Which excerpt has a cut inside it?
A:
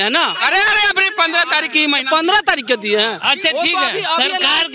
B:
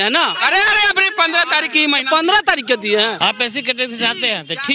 B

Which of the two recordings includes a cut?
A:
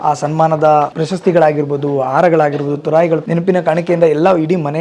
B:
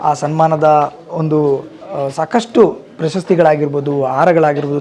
A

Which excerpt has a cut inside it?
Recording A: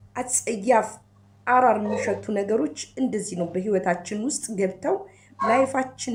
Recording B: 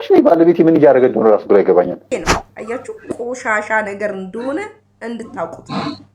B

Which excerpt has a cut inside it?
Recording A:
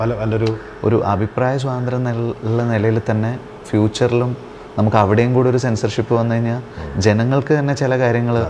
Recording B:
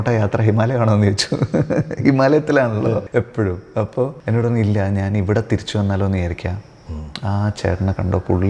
B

